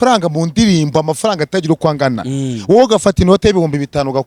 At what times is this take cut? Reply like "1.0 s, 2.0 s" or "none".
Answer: none